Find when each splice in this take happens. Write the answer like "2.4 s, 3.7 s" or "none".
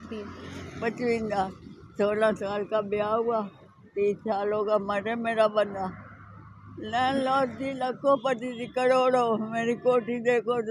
none